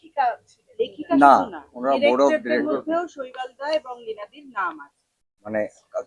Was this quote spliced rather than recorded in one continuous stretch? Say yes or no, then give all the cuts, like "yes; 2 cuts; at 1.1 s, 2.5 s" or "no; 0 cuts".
no; 0 cuts